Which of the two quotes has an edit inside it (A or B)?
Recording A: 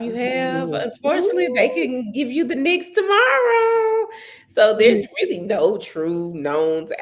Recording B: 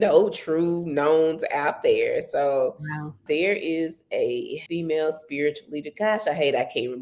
B